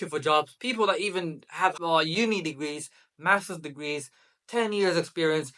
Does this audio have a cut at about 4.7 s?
no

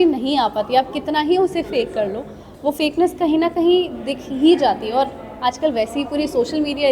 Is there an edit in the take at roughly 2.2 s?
no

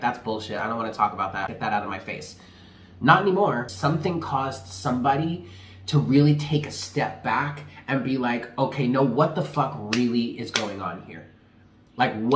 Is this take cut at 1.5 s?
yes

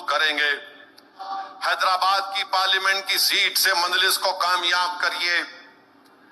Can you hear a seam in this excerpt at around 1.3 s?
yes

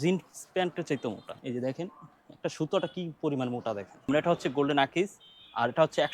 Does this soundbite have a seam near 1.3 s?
yes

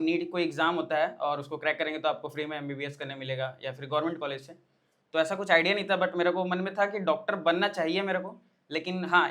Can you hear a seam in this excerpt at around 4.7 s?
no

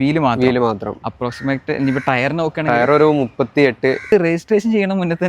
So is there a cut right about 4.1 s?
yes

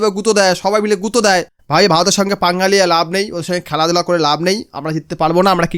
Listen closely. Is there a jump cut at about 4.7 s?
no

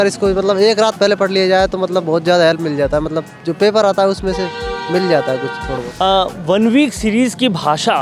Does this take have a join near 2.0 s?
no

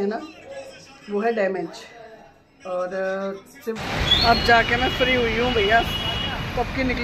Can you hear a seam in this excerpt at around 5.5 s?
no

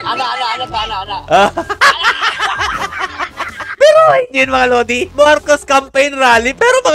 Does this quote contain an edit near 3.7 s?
yes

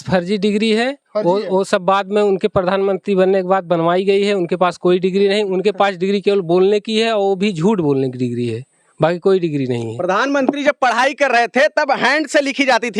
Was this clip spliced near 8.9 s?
no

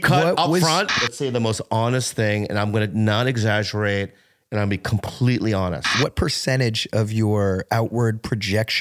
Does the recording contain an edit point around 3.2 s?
no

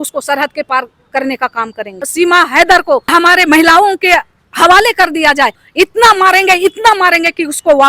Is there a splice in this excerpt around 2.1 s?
yes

